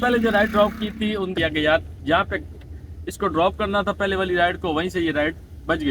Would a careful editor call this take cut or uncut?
cut